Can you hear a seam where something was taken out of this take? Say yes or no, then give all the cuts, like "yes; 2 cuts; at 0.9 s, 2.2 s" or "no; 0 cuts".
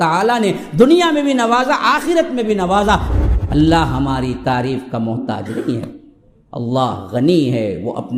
yes; 1 cut; at 3.1 s